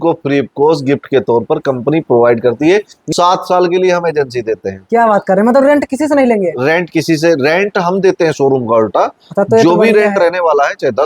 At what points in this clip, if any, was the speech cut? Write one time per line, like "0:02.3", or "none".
0:03.0